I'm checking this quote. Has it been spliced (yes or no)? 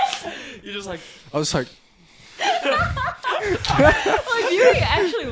no